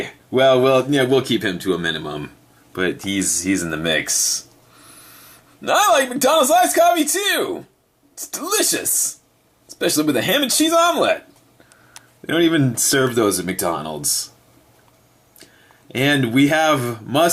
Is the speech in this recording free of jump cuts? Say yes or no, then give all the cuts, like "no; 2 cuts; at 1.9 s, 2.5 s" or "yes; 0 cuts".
yes; 0 cuts